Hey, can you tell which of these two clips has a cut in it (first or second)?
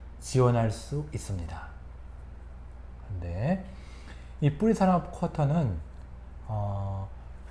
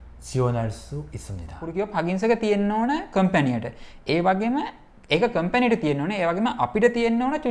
second